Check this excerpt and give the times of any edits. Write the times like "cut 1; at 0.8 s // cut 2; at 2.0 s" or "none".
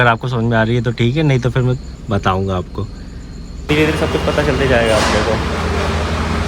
cut 1; at 3.7 s